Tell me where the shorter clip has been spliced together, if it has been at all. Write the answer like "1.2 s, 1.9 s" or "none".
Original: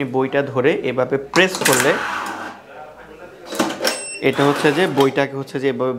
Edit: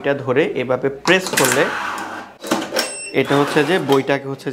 2.3 s